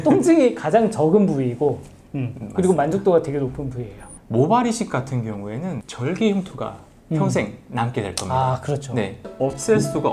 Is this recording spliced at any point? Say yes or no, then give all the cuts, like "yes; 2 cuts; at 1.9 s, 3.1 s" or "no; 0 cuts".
yes; 1 cut; at 4.2 s